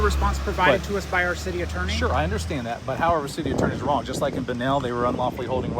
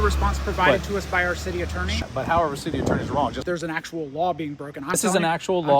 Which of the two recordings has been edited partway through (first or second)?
second